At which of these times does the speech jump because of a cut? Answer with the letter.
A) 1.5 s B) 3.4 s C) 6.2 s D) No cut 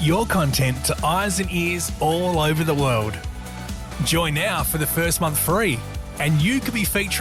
D